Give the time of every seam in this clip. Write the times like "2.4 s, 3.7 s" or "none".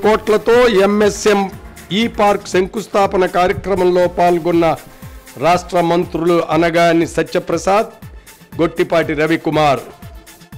none